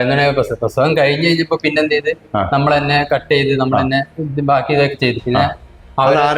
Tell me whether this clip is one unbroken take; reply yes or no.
yes